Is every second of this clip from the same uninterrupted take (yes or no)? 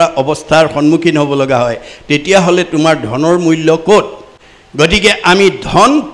yes